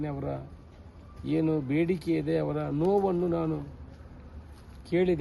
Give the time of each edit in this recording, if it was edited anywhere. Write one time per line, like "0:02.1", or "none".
none